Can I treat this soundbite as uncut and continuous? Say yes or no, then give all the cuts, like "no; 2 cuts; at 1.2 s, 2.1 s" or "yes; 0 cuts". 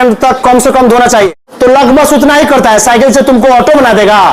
no; 1 cut; at 1.4 s